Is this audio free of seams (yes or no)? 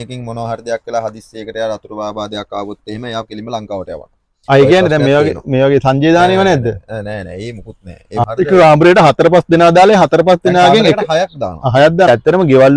no